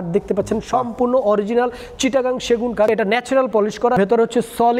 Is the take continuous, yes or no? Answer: no